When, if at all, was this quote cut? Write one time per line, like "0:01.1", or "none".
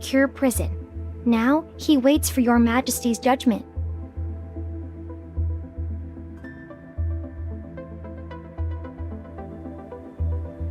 0:03.7